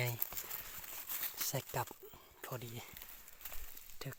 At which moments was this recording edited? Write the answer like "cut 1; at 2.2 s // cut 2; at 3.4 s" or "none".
none